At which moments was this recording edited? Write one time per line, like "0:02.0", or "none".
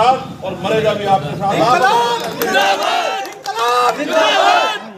none